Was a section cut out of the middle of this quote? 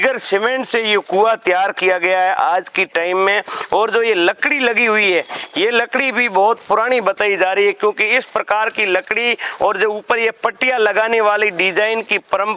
no; 0 cuts

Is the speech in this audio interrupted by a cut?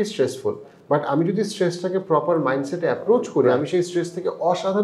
no; 0 cuts

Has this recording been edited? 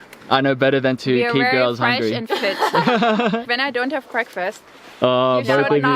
yes; 1 cut; at 3.5 s

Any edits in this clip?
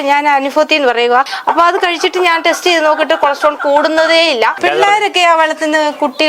yes; 2 cuts; at 1.3 s, 4.6 s

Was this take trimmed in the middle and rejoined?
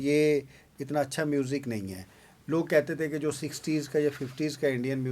no; 0 cuts

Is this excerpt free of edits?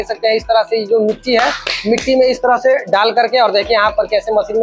yes; 0 cuts

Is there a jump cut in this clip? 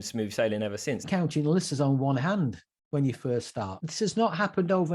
yes; 2 cuts; at 1.1 s, 3.8 s

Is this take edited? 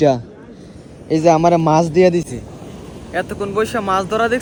no; 0 cuts

